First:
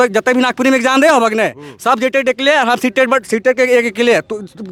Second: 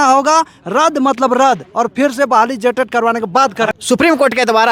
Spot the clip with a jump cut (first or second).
second